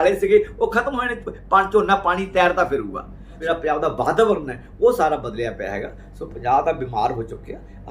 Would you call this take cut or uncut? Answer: cut